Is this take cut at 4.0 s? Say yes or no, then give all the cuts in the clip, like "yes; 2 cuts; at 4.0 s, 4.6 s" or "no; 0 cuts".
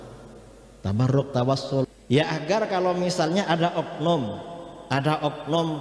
no; 1 cut; at 1.9 s